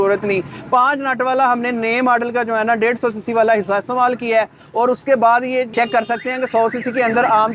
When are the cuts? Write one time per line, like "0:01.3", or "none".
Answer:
none